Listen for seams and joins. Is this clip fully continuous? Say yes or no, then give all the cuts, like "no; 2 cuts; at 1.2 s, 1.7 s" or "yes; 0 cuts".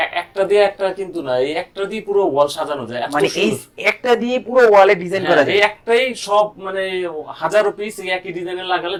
yes; 0 cuts